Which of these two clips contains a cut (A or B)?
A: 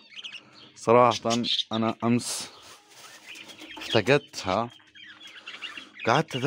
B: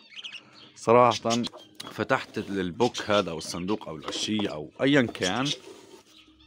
B